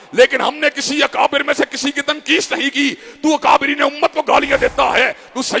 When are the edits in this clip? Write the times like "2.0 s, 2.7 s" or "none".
none